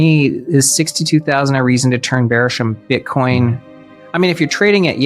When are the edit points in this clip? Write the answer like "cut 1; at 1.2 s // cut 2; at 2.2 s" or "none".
none